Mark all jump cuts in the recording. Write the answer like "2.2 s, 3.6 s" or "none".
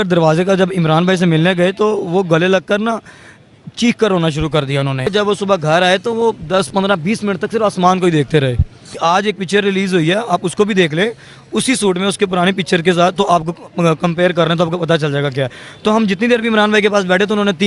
5.1 s, 8.9 s